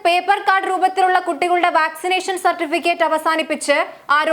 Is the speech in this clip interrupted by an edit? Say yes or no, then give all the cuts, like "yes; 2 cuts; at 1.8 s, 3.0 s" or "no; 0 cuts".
no; 0 cuts